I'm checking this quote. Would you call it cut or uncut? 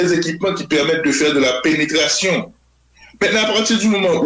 uncut